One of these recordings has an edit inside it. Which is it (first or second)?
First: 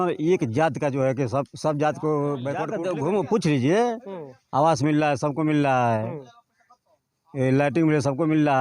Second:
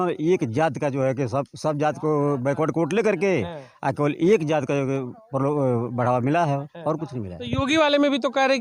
first